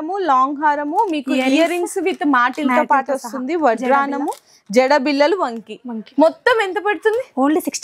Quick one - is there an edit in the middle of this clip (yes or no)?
no